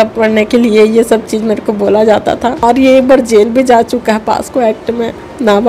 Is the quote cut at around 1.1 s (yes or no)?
no